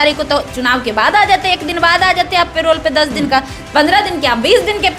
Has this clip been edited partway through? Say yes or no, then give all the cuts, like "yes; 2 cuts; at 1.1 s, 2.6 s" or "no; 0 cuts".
no; 0 cuts